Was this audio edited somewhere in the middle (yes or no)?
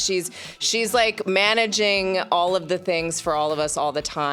no